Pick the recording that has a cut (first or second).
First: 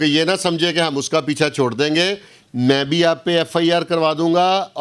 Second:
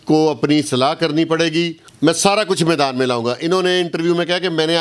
second